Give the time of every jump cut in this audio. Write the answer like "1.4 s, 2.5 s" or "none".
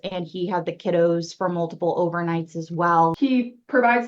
3.2 s